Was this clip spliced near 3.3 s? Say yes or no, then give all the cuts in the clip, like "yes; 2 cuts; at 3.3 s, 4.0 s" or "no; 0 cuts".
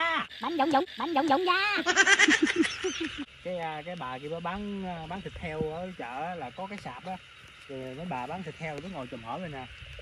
yes; 1 cut; at 3.3 s